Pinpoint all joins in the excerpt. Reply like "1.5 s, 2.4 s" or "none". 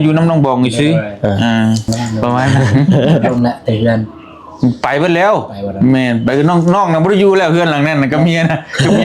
3.3 s